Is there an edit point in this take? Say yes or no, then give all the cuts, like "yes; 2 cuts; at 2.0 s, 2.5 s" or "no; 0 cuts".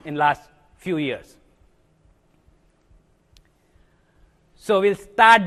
no; 0 cuts